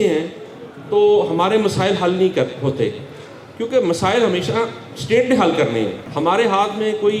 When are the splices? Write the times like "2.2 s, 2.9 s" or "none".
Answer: 6.0 s